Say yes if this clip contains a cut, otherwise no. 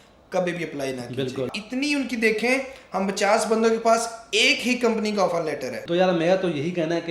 yes